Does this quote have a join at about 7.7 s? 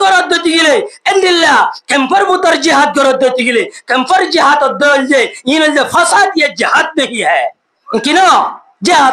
yes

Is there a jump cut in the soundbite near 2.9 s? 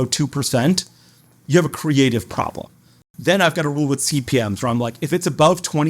yes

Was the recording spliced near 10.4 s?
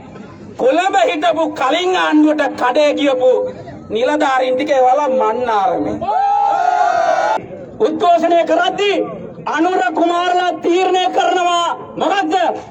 no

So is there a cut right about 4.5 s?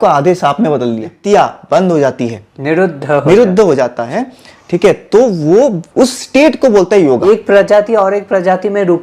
no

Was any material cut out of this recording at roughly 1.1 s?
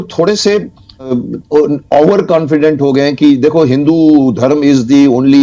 yes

